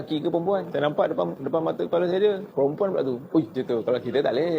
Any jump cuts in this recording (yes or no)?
yes